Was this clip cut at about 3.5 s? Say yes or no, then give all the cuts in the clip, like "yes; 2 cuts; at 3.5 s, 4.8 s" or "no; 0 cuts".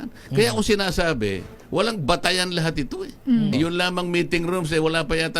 yes; 1 cut; at 3.5 s